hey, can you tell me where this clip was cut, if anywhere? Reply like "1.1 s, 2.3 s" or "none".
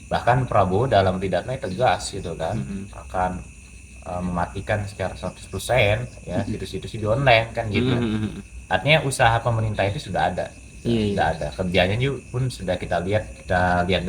none